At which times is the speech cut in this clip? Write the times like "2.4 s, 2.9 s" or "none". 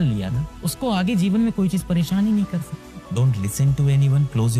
2.9 s